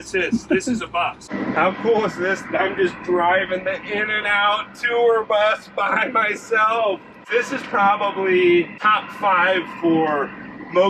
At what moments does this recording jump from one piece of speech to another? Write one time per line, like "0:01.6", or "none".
0:01.2
0:07.2
0:08.8